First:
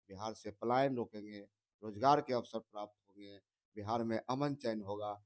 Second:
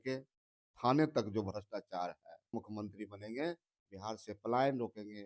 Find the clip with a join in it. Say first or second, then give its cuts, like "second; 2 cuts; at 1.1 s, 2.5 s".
second; 1 cut; at 2.5 s